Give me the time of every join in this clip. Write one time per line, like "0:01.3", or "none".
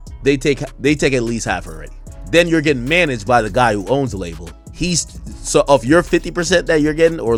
none